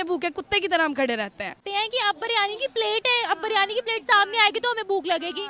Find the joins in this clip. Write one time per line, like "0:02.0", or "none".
0:01.7